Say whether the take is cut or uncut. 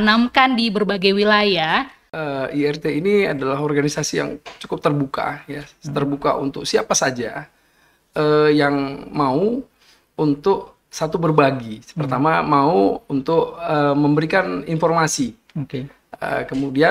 cut